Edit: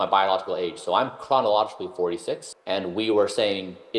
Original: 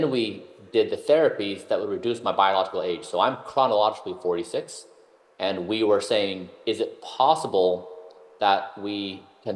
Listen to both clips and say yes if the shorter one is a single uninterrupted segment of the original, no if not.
no